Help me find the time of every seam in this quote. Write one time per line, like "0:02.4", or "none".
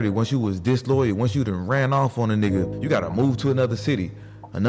0:02.8